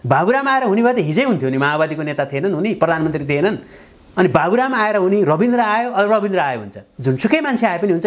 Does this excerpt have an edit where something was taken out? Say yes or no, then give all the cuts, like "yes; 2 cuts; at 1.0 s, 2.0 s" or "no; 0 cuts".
yes; 1 cut; at 6.9 s